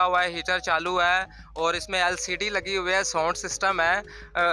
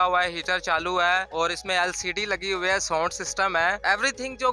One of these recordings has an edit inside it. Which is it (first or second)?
second